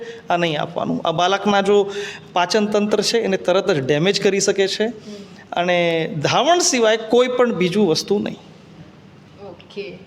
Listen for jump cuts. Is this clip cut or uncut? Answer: uncut